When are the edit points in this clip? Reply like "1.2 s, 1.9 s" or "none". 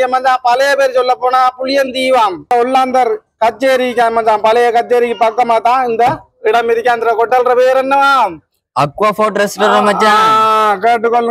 2.5 s

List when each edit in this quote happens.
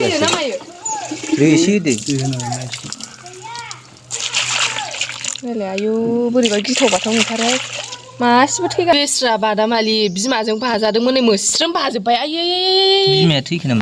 8.9 s

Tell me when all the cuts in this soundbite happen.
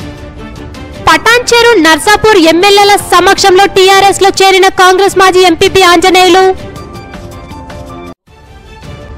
1.1 s

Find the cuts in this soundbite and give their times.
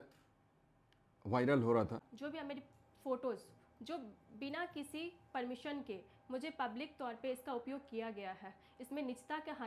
2.1 s

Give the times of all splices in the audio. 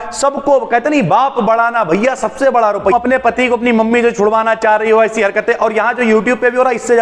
2.9 s

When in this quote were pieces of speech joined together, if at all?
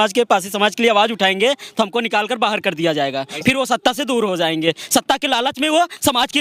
none

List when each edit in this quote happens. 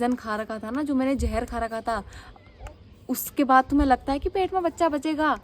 none

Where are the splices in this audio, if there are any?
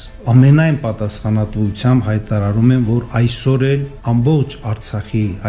3.9 s

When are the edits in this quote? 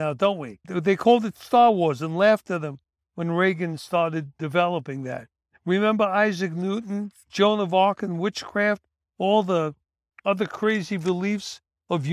none

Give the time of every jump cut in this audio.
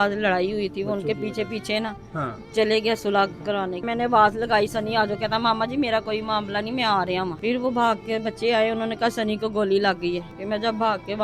3.8 s, 7.4 s, 10.3 s

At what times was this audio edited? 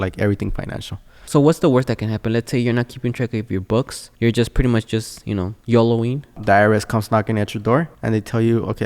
1.2 s, 4.0 s, 5.5 s, 6.4 s, 8.0 s

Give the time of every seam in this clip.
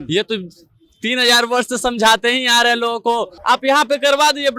3.3 s

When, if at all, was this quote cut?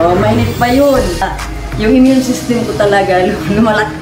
1.2 s

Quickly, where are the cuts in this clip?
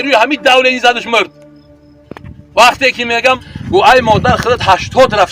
3.4 s

